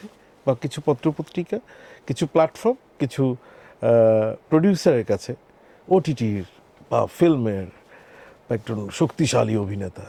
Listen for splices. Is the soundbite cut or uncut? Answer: uncut